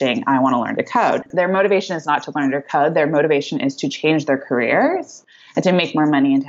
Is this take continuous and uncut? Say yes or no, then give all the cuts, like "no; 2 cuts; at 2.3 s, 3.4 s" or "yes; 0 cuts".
yes; 0 cuts